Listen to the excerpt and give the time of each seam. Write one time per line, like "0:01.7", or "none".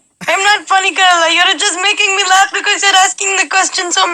none